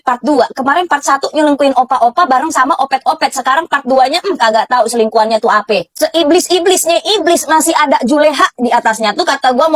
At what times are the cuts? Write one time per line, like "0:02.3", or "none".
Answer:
0:05.9